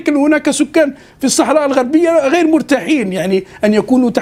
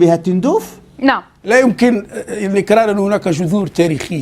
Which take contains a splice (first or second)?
second